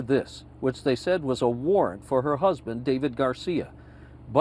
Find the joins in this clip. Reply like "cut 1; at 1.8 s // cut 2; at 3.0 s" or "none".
none